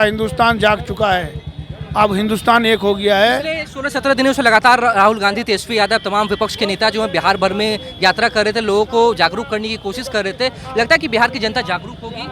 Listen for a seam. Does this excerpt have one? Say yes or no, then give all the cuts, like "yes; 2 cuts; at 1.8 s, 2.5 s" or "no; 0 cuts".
no; 0 cuts